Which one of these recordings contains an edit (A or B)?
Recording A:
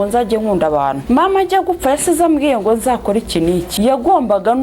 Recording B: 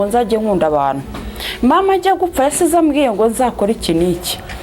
A